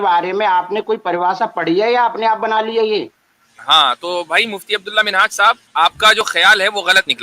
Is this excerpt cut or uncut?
cut